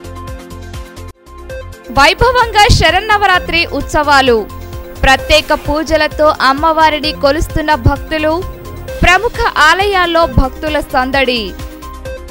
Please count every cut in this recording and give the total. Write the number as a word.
one